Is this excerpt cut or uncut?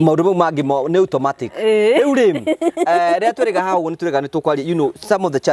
uncut